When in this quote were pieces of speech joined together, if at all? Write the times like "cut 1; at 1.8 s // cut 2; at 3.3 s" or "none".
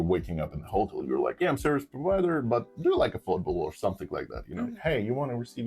cut 1; at 1.3 s // cut 2; at 4.8 s